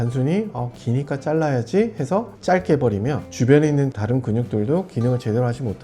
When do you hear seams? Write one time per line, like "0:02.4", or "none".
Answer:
0:02.3
0:03.3